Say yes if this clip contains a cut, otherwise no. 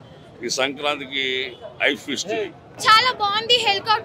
yes